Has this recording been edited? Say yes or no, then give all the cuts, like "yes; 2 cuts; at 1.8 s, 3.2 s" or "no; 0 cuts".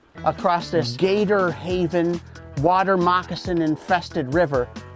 yes; 1 cut; at 0.9 s